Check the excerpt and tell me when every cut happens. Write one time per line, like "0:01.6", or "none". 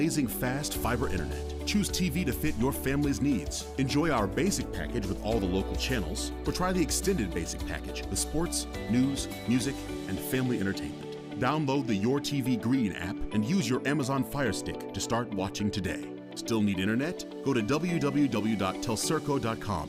none

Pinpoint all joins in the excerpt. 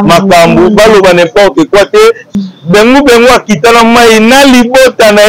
0:02.3

